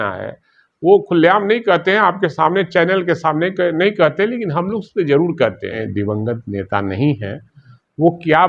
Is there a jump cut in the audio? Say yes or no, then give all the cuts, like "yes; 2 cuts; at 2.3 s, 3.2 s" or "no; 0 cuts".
yes; 1 cut; at 5.8 s